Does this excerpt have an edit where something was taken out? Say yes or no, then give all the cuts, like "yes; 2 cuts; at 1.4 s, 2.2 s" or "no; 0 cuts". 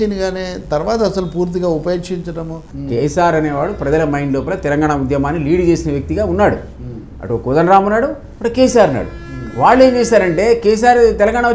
yes; 1 cut; at 2.6 s